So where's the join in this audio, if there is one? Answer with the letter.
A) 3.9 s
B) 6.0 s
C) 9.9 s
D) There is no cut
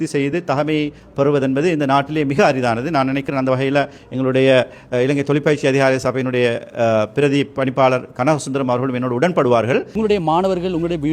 C